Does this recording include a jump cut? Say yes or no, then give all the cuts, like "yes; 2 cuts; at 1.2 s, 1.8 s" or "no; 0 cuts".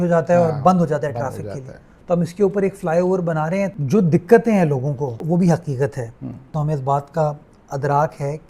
yes; 3 cuts; at 3.7 s, 5.2 s, 6.5 s